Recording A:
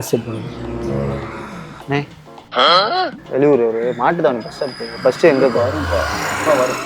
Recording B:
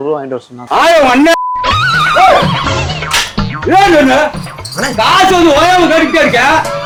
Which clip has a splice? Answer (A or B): A